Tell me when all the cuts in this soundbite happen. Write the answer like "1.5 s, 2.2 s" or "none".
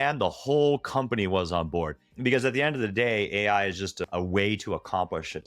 2.1 s, 4.0 s

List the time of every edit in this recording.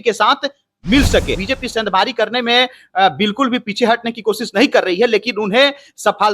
1.4 s

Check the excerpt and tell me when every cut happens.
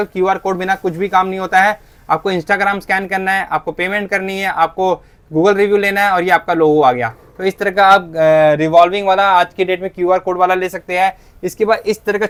none

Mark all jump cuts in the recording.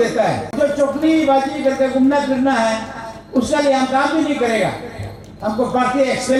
none

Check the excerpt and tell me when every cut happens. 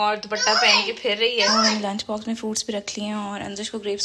1.5 s

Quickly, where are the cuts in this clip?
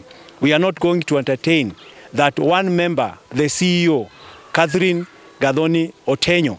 none

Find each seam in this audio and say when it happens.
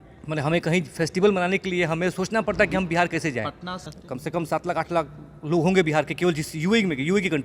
3.9 s

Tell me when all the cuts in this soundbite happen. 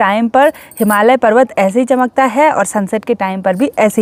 none

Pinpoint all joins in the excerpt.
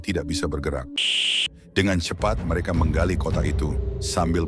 1.3 s

